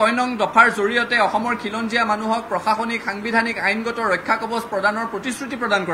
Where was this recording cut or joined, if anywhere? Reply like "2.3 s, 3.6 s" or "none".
none

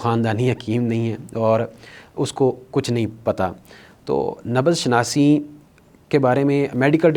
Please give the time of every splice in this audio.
none

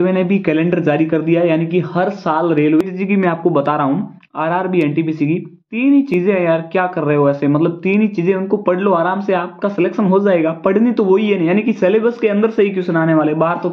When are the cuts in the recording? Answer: 2.8 s

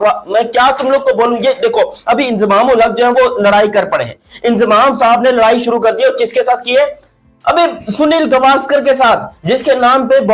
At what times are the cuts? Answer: none

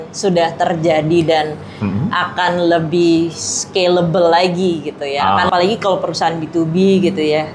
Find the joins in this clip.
5.5 s

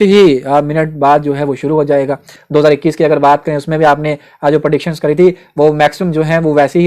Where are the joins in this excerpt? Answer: 2.3 s

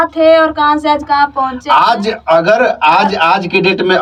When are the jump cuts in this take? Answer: none

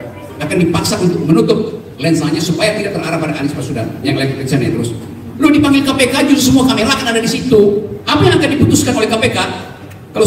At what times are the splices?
8.0 s

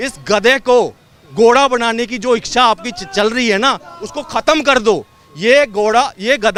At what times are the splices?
none

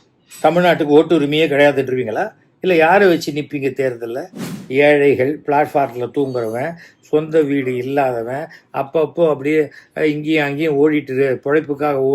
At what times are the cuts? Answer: 4.5 s

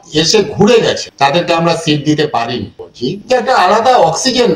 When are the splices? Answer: 2.9 s

